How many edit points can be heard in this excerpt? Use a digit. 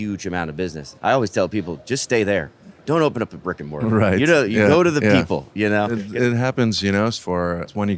3